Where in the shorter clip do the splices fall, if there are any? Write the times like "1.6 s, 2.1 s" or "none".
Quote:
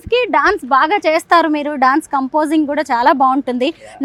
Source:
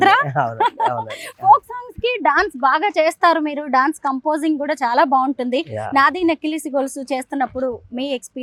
none